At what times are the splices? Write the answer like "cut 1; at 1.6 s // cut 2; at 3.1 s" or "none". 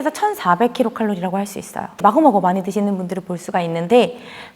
cut 1; at 1.9 s